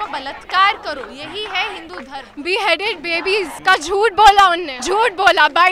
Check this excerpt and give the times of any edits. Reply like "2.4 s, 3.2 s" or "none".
2.3 s, 3.5 s, 4.7 s